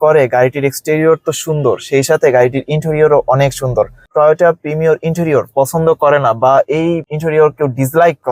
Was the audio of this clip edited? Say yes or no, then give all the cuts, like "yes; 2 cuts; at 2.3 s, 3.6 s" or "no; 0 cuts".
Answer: no; 0 cuts